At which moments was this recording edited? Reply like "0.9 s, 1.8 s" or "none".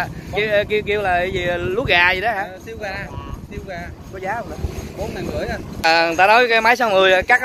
5.8 s